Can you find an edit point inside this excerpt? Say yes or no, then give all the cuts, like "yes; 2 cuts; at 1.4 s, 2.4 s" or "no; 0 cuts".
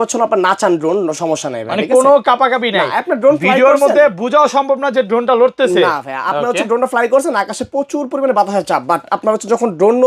no; 0 cuts